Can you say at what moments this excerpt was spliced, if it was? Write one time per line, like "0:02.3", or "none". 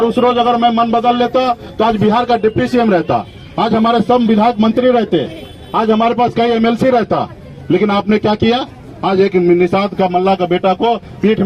none